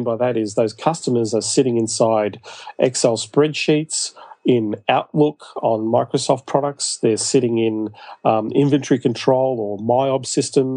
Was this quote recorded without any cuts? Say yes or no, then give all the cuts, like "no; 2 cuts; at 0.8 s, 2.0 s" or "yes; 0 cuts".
yes; 0 cuts